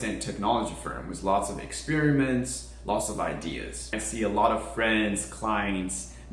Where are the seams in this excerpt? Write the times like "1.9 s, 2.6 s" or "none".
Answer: 4.0 s